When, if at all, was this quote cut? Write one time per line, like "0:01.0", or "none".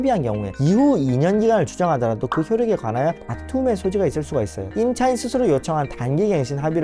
0:04.7